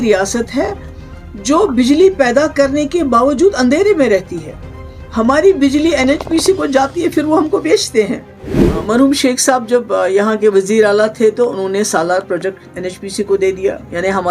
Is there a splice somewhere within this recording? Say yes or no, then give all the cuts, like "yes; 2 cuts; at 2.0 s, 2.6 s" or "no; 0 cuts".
yes; 1 cut; at 8.7 s